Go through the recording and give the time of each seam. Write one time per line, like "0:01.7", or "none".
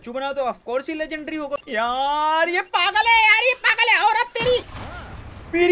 0:01.6